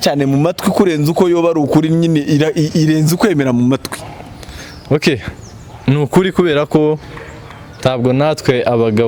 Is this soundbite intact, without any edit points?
yes; 0 cuts

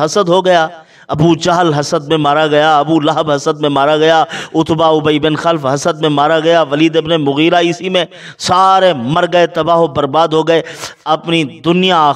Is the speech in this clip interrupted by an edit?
no; 0 cuts

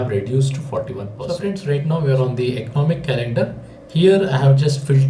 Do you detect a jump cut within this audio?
yes; 1 cut; at 1.2 s

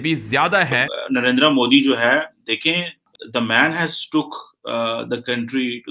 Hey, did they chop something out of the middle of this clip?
yes; 2 cuts; at 0.9 s, 3.1 s

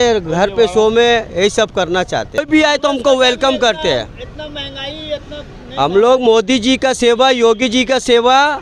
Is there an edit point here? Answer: yes; 1 cut; at 2.4 s

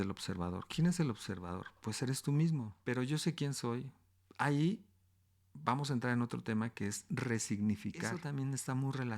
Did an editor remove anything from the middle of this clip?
yes; 2 cuts; at 2.7 s, 8.2 s

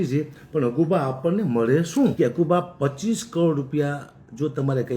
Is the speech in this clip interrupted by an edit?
yes; 1 cut; at 2.1 s

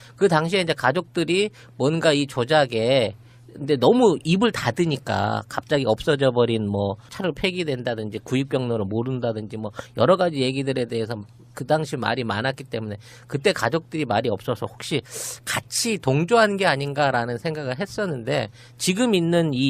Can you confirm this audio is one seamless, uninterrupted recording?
no; 1 cut; at 18.5 s

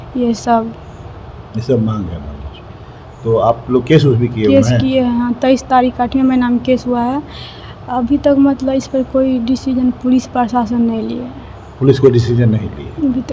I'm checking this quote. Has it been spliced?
no; 0 cuts

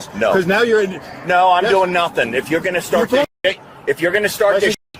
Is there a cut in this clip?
no; 0 cuts

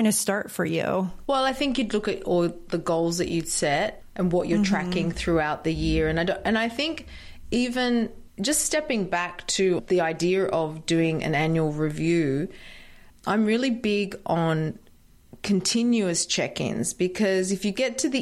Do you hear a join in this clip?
yes; 1 cut; at 1.2 s

